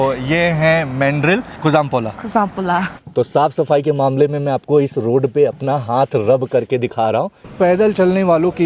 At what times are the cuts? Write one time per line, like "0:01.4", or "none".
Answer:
0:01.5
0:02.9
0:07.4